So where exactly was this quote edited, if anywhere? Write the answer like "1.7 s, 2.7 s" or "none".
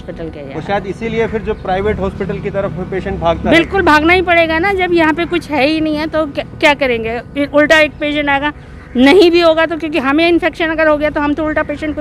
none